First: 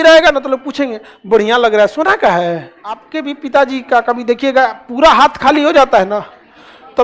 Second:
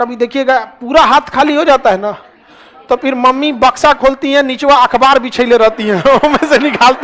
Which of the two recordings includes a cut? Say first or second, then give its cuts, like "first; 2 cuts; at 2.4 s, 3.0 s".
first; 1 cut; at 3.1 s